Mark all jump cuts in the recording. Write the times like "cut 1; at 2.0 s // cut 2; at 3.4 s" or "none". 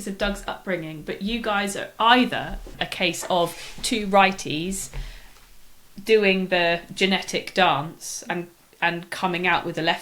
none